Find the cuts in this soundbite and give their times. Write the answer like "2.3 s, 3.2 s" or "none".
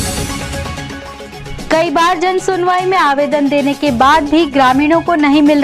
1.3 s